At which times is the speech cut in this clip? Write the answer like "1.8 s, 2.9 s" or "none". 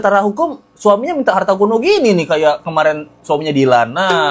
none